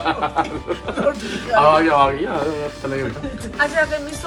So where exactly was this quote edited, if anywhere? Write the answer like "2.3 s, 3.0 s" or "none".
none